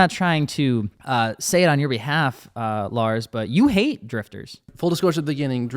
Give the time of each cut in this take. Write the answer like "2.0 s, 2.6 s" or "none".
1.0 s, 4.7 s